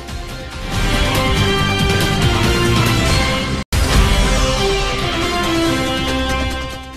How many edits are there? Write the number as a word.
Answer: two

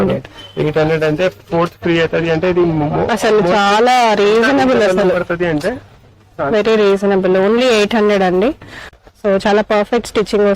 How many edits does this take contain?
one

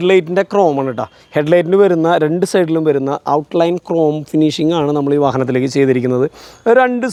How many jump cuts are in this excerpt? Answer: zero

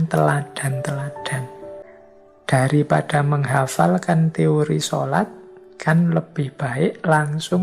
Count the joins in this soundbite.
one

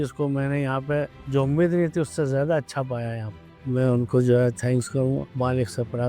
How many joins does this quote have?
two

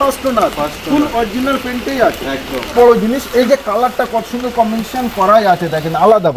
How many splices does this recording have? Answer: one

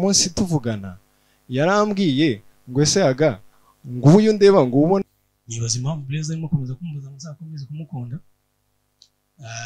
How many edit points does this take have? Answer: one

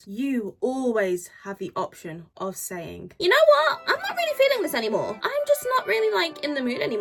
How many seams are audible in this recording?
zero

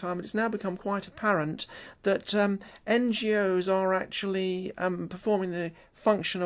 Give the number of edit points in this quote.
zero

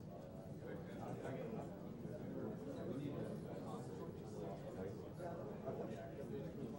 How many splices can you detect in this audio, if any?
one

